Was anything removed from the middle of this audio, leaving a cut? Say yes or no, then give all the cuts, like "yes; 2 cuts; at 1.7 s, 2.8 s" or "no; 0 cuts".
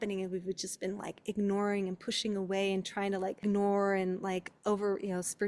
yes; 1 cut; at 3.4 s